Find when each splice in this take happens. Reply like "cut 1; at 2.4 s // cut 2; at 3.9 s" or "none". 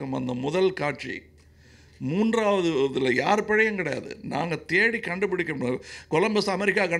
none